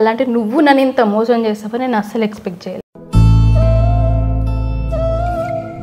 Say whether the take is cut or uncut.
uncut